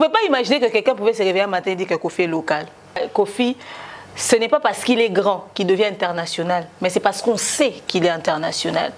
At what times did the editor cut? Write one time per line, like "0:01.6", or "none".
0:03.1